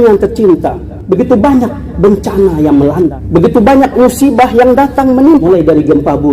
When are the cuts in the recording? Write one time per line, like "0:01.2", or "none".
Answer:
0:03.2
0:05.5